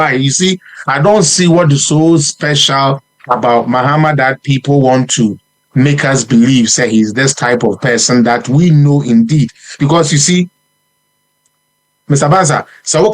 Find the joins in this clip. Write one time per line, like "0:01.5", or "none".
none